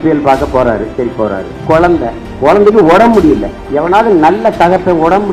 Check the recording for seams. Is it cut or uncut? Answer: cut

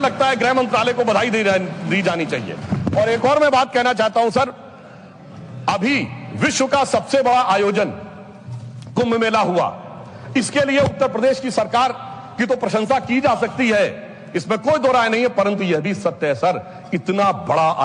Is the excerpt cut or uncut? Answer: uncut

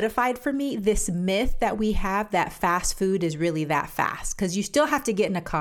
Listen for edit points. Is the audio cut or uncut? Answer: uncut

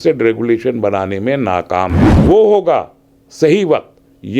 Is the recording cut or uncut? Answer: cut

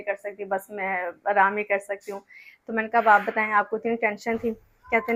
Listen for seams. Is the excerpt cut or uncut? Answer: uncut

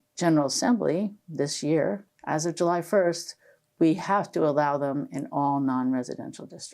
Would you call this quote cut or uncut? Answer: cut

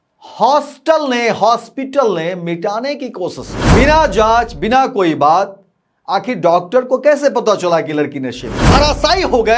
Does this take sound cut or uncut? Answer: cut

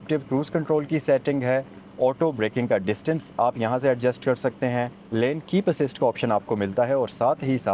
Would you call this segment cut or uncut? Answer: uncut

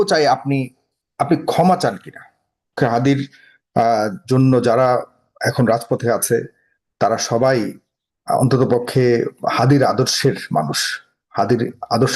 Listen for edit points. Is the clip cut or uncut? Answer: cut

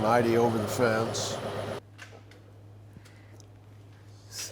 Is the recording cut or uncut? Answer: cut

